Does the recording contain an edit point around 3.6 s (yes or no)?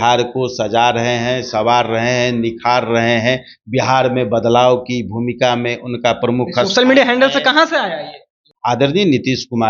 no